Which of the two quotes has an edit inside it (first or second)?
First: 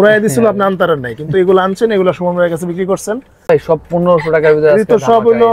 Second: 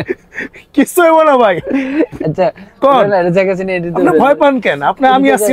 first